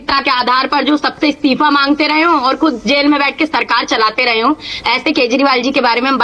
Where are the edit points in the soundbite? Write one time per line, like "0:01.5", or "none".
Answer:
none